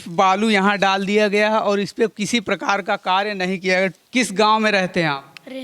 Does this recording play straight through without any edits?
no; 1 cut; at 4.0 s

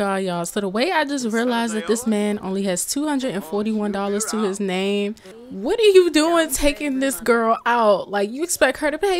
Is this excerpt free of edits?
yes; 0 cuts

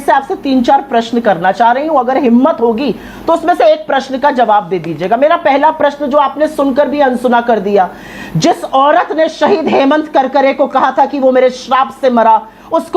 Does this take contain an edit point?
no; 0 cuts

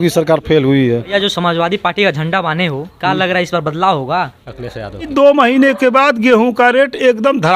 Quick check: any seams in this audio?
yes; 2 cuts; at 1.1 s, 5.0 s

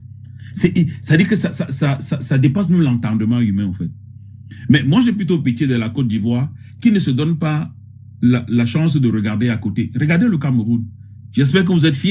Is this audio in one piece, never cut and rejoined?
yes; 0 cuts

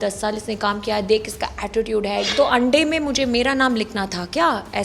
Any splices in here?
yes; 1 cut; at 2.3 s

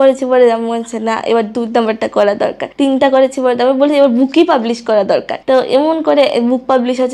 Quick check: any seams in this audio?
yes; 2 cuts; at 2.6 s, 5.3 s

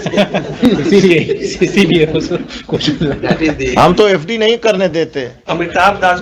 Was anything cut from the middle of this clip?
no; 0 cuts

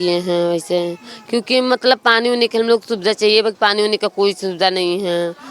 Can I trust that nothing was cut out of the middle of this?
yes; 0 cuts

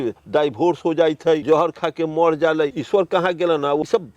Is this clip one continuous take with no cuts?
no; 2 cuts; at 1.4 s, 2.8 s

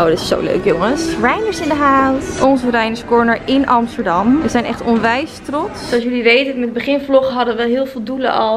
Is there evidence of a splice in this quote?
yes; 2 cuts; at 2.3 s, 5.9 s

